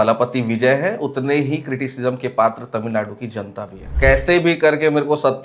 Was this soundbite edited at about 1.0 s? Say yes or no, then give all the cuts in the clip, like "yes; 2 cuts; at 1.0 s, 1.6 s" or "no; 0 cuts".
no; 1 cut; at 3.8 s